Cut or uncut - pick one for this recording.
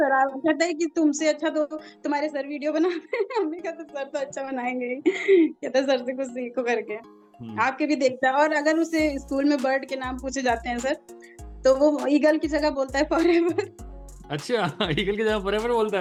uncut